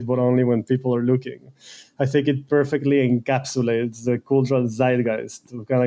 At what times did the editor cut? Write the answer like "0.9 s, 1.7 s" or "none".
none